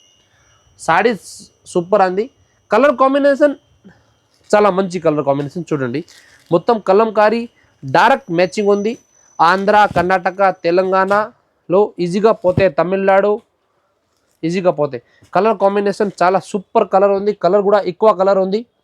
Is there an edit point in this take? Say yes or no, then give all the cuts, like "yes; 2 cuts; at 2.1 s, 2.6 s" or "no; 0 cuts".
no; 0 cuts